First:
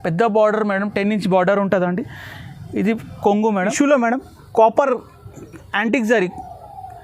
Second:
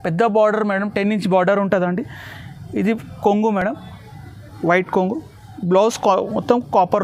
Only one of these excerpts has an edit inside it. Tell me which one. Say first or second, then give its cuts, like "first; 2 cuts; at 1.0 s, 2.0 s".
first; 1 cut; at 3.6 s